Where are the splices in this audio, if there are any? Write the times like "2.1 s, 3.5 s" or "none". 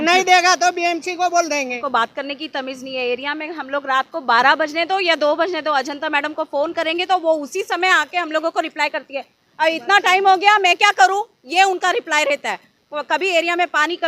1.8 s